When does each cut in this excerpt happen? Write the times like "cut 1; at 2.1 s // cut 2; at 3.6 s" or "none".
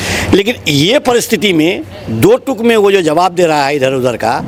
none